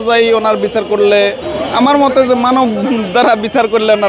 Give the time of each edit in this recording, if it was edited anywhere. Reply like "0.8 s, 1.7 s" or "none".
1.4 s